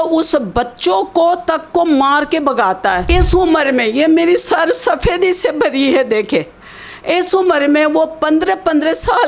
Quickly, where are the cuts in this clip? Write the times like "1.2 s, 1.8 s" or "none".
3.1 s